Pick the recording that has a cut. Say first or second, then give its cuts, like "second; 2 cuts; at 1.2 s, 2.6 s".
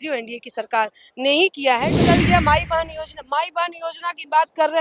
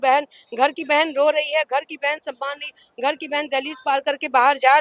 first; 1 cut; at 2.0 s